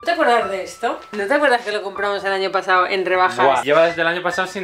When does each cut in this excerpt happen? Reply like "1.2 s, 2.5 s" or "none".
1.1 s, 3.6 s